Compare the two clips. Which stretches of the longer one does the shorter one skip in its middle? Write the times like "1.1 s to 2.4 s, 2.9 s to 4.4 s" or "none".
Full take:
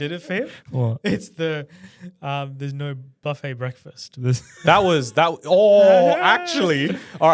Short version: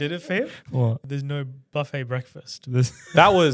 1.0 s to 2.5 s